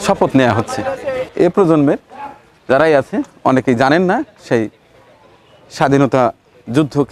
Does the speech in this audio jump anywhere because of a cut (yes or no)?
yes